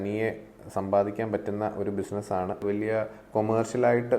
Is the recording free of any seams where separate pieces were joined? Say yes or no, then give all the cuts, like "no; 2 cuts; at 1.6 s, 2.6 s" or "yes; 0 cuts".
no; 1 cut; at 2.6 s